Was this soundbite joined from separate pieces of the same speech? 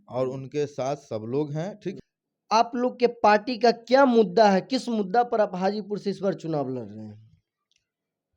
yes; 1 cut; at 1.9 s

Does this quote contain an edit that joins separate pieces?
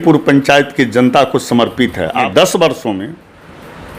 yes; 1 cut; at 2.3 s

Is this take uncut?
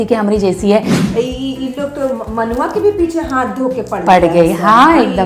no; 1 cut; at 0.9 s

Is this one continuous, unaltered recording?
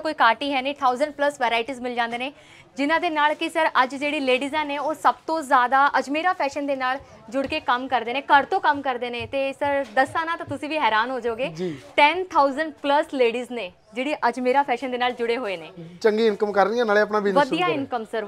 yes; 0 cuts

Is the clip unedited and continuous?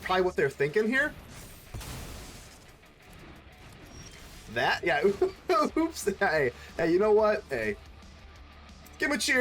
yes; 0 cuts

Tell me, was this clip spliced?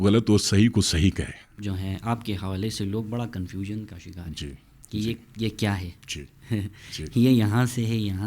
yes; 1 cut; at 1.4 s

